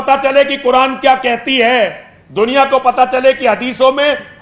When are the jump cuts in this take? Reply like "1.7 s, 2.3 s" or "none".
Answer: none